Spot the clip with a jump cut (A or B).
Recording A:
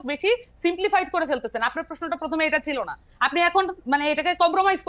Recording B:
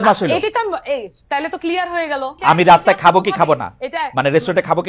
B